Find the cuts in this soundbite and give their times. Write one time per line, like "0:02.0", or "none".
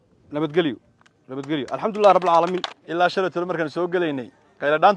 0:02.7